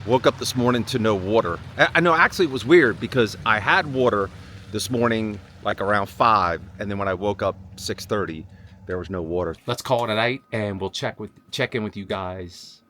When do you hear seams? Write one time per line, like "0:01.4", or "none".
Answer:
0:09.6